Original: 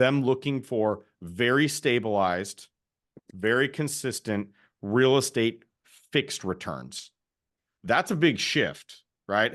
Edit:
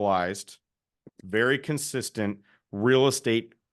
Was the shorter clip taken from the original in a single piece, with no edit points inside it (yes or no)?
yes